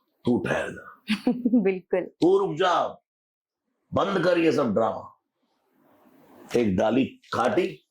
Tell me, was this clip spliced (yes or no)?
no